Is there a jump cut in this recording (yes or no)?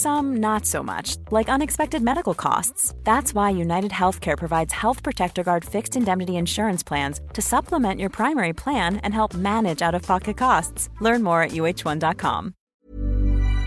no